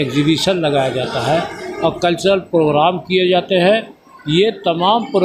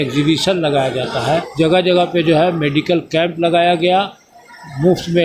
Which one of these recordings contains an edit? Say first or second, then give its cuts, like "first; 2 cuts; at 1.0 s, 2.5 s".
second; 1 cut; at 1.7 s